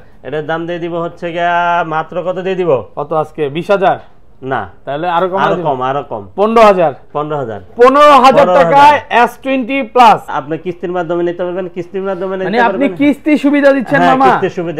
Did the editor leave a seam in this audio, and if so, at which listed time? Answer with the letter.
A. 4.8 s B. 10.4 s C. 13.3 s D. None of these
B